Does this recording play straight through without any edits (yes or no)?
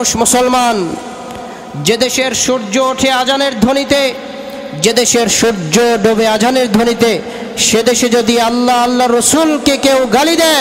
yes